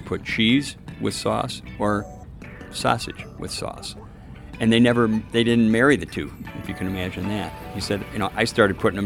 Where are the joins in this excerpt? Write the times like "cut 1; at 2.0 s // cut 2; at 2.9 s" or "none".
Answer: cut 1; at 6.4 s